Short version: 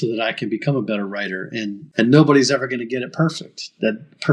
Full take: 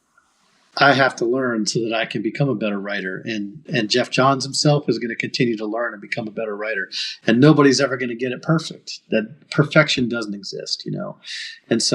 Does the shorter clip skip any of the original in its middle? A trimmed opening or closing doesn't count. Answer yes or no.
yes